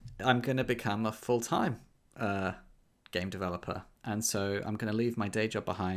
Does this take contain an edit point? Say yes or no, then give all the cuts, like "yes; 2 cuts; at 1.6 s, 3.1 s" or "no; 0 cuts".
yes; 1 cut; at 3.9 s